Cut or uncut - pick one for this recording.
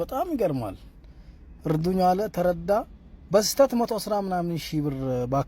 uncut